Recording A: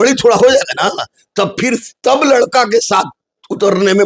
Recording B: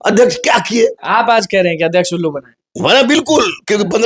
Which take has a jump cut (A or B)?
B